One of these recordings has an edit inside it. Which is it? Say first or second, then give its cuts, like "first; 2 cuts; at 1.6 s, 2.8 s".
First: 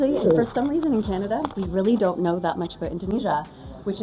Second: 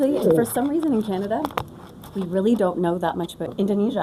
first; 2 cuts; at 1.5 s, 3.0 s